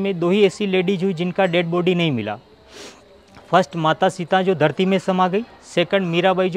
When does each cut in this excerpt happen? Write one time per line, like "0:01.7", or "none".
none